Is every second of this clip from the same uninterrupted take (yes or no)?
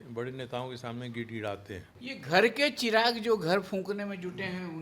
no